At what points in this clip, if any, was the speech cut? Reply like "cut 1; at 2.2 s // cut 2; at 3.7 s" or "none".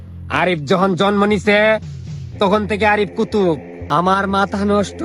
cut 1; at 3.7 s